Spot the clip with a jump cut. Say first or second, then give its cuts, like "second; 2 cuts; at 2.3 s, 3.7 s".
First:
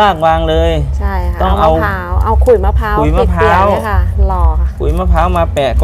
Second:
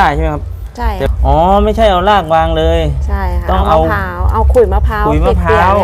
second; 1 cut; at 1.1 s